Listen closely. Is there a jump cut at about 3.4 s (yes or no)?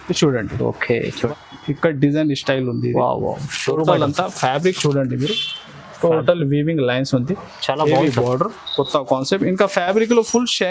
no